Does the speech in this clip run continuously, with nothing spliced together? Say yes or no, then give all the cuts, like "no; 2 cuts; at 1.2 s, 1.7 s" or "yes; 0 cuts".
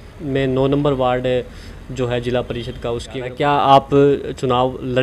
no; 1 cut; at 3.1 s